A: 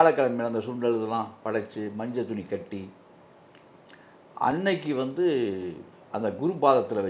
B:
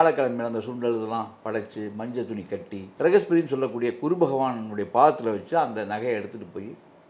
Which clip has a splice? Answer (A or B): B